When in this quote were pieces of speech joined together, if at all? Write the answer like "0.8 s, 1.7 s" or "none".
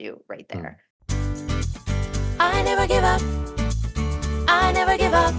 1.1 s